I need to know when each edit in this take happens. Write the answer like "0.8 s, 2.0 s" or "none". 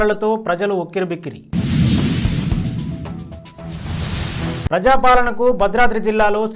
none

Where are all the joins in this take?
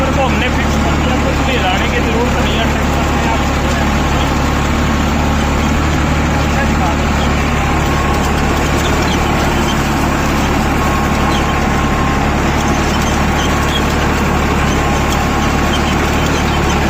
none

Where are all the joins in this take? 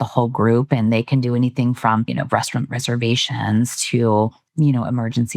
2.1 s, 4.4 s

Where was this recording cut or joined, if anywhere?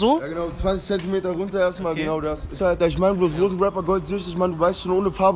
2.5 s

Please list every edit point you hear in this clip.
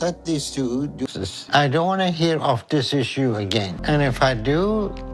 1.1 s

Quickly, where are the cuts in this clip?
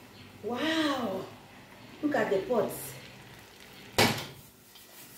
4.0 s

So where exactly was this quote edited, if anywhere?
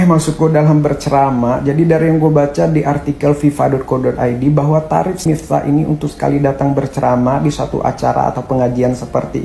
none

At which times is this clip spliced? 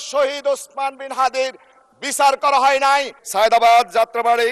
3.2 s

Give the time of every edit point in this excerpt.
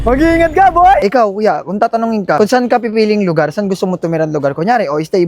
1.0 s

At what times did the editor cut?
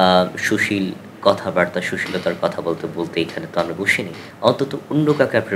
4.2 s

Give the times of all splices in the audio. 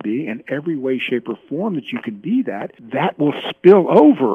2.7 s

